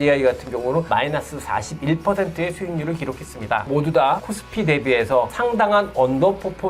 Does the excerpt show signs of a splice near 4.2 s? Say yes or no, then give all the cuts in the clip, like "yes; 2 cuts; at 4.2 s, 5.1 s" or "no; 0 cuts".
yes; 3 cuts; at 0.9 s, 4.2 s, 5.3 s